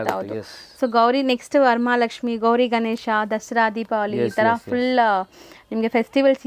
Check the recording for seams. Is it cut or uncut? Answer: uncut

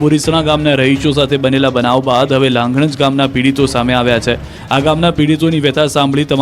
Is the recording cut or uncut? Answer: cut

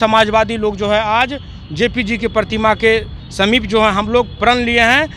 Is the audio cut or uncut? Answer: uncut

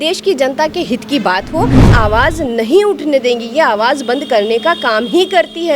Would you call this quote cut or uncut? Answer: cut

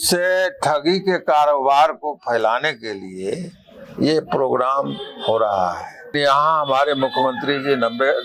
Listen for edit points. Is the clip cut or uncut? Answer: cut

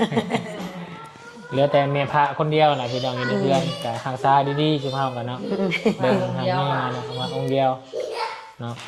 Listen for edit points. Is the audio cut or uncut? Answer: uncut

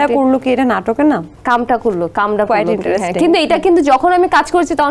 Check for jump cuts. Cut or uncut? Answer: cut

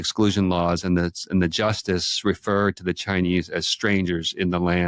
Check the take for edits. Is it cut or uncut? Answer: uncut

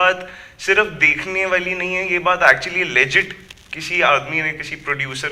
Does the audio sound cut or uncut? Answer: uncut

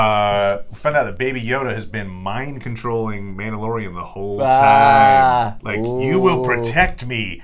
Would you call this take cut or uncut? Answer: uncut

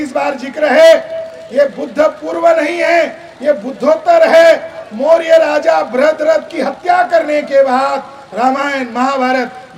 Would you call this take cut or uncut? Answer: uncut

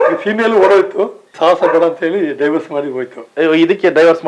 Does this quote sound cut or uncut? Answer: cut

